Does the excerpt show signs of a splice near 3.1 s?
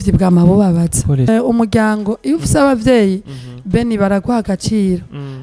no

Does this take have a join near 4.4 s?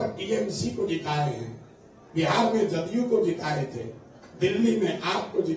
no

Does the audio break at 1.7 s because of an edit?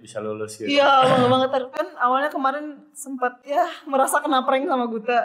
no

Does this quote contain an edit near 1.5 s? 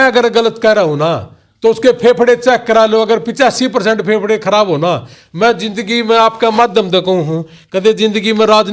no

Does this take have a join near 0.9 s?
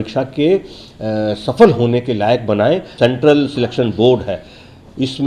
no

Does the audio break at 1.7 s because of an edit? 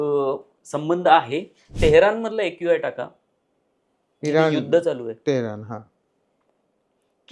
yes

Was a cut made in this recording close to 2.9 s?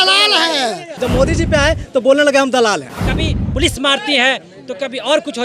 yes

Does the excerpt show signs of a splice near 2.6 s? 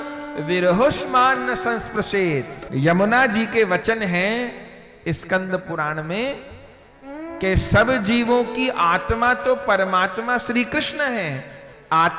yes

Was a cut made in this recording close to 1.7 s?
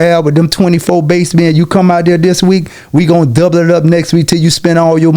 no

